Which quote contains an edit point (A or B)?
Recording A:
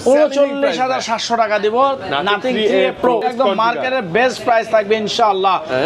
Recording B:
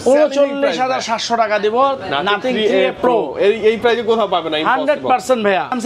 A